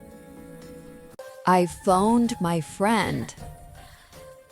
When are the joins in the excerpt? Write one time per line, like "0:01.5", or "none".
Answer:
0:01.2